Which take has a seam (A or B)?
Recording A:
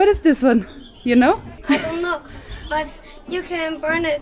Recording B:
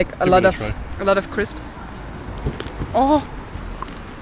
A